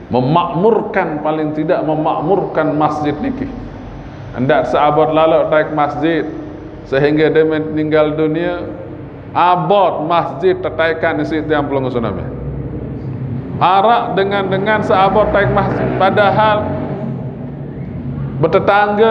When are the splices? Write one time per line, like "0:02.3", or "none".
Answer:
none

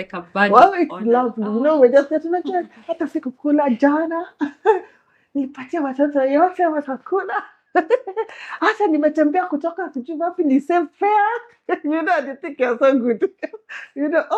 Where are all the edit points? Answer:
none

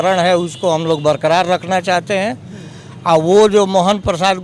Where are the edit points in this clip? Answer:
none

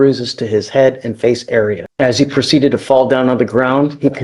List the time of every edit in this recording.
0:01.8

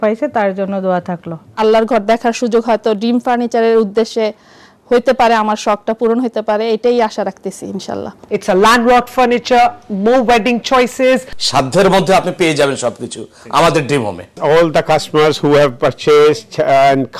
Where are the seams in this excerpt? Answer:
0:01.5
0:08.2
0:11.4
0:14.3

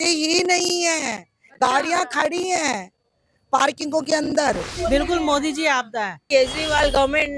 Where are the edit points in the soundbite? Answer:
0:04.7
0:06.1

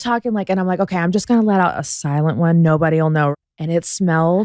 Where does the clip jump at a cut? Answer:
0:03.3

